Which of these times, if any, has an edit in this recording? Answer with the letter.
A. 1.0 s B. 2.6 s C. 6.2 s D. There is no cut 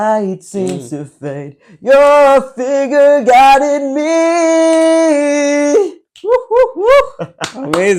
D